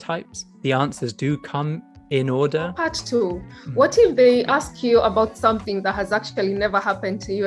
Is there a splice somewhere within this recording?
yes; 1 cut; at 2.9 s

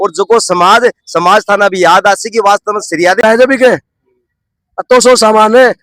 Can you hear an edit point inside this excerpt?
yes; 1 cut; at 3.2 s

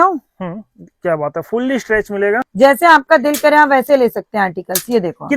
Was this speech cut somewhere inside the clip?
yes; 1 cut; at 2.5 s

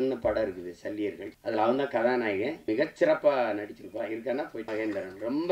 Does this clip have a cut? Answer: yes; 3 cuts; at 1.3 s, 2.6 s, 4.6 s

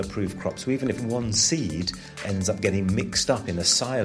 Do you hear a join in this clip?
yes; 1 cut; at 2.1 s

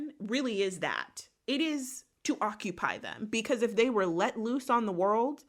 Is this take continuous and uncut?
yes; 0 cuts

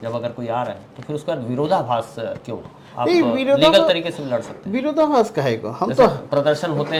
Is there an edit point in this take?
no; 0 cuts

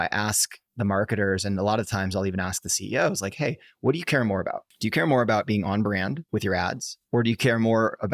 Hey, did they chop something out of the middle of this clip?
yes; 3 cuts; at 4.7 s, 6.2 s, 6.9 s

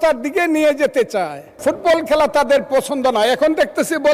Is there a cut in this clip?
yes; 1 cut; at 1.5 s

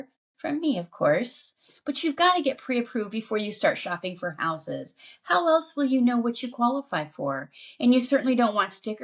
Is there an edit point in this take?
no; 0 cuts

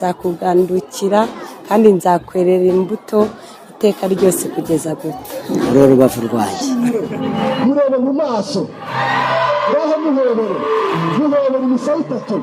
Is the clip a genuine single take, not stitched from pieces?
no; 1 cut; at 6.6 s

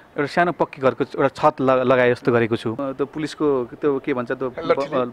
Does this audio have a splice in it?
yes; 1 cut; at 2.8 s

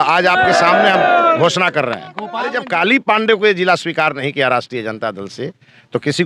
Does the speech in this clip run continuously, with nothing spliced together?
no; 1 cut; at 2.5 s

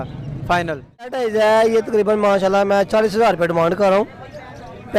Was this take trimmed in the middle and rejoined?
yes; 1 cut; at 1.2 s

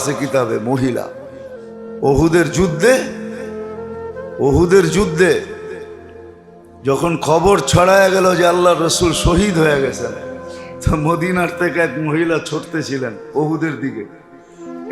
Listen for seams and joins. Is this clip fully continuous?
no; 2 cuts; at 3.1 s, 4.4 s

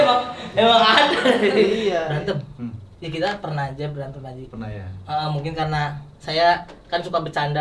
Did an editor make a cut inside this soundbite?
yes; 1 cut; at 2.1 s

